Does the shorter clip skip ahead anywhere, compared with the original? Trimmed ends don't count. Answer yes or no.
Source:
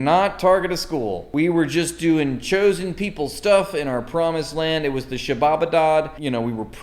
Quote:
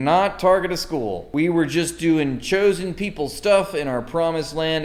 no